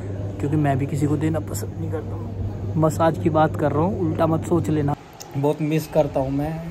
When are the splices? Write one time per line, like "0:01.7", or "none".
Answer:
0:05.1